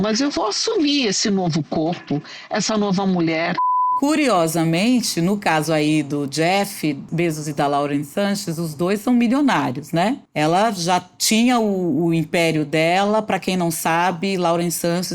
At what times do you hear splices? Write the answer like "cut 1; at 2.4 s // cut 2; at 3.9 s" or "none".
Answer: cut 1; at 3.9 s // cut 2; at 7.1 s // cut 3; at 10.2 s